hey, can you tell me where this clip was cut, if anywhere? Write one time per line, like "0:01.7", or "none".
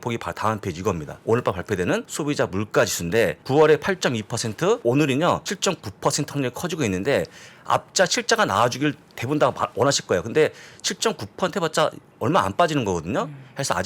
0:01.1
0:02.1
0:03.4
0:04.8
0:05.5